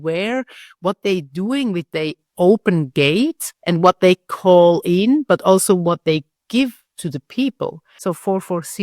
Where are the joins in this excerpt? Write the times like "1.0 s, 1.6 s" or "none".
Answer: 7.8 s